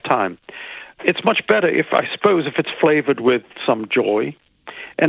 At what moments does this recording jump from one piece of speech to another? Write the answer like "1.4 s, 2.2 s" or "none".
0.9 s

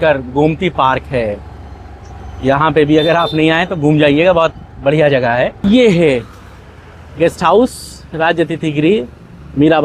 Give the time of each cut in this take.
5.6 s

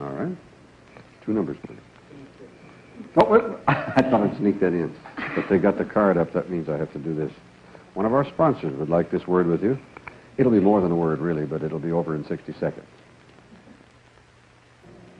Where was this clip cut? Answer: 5.6 s

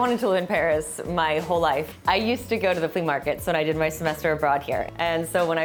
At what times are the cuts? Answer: none

